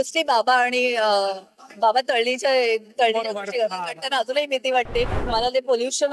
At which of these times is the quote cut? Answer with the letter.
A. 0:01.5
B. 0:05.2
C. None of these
B